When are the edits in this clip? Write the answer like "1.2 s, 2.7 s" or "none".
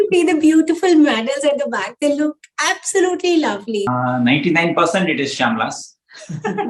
3.9 s

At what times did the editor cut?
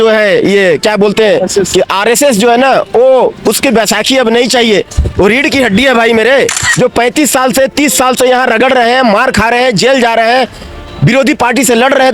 6.7 s

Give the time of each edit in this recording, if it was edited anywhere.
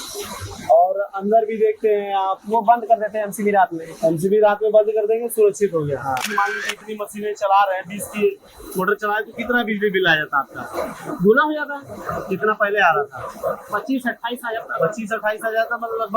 6.3 s

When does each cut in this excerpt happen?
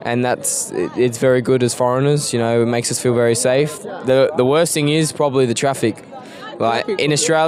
none

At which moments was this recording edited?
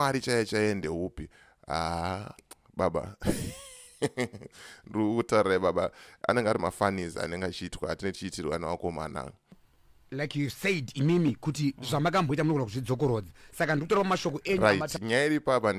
9.5 s

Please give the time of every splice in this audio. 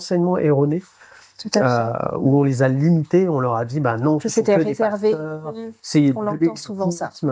none

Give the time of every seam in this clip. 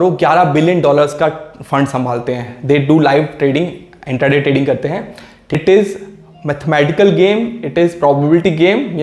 5.6 s

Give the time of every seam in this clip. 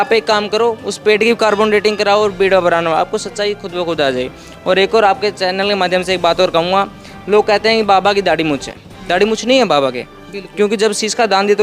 none

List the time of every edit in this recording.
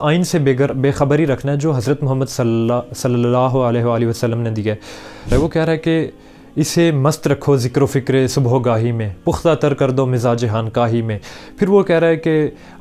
5.3 s

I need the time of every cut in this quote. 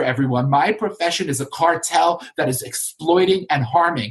none

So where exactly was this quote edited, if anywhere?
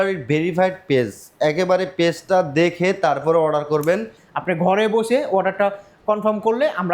4.2 s

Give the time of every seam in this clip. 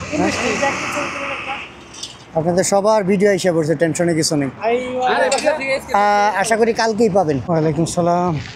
7.4 s

